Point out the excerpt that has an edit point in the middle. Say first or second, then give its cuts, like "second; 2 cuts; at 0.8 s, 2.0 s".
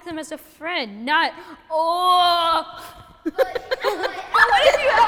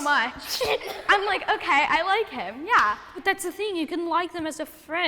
second; 2 cuts; at 1.0 s, 3.2 s